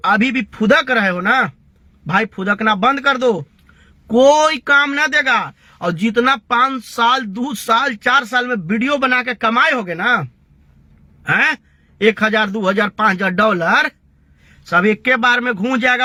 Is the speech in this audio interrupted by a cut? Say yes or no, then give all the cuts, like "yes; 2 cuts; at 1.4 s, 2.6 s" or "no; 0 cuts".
no; 0 cuts